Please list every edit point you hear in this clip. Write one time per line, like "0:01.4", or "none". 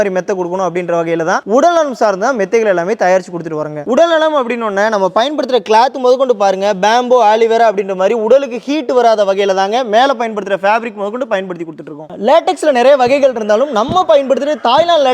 none